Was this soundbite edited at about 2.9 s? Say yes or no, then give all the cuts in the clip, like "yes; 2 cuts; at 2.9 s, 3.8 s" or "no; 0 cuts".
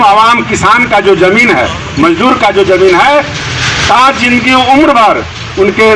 no; 0 cuts